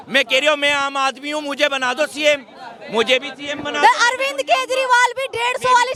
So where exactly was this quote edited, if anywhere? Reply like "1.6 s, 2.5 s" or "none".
none